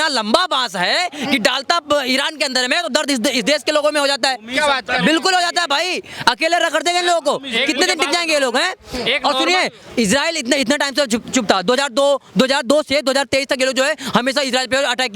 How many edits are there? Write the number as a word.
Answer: zero